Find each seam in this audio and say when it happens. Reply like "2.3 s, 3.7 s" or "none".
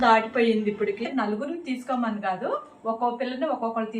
1.0 s